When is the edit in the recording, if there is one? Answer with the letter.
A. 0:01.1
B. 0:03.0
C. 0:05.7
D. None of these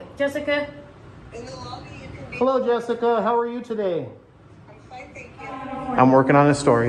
C